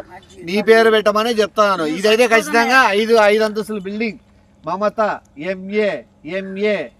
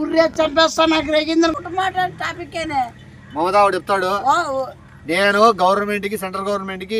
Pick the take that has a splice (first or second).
second